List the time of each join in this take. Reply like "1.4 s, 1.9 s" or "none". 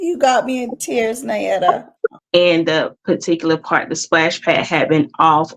2.2 s